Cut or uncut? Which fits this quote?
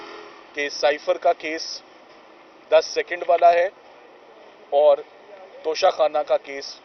uncut